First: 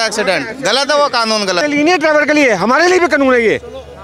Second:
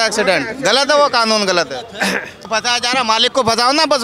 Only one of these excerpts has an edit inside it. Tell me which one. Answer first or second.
first